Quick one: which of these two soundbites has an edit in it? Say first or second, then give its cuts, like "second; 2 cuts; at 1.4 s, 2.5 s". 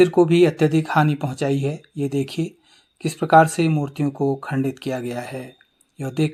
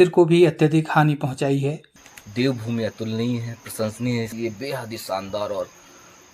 second; 2 cuts; at 1.9 s, 4.3 s